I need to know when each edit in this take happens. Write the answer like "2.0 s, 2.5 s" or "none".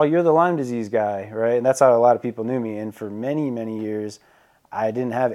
none